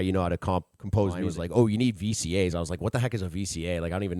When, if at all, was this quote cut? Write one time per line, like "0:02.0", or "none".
0:01.2